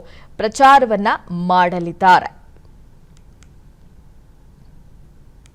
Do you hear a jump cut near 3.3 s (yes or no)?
yes